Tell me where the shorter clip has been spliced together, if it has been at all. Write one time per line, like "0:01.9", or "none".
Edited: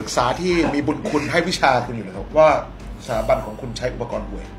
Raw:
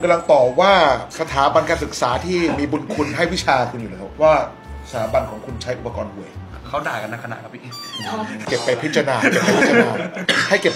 none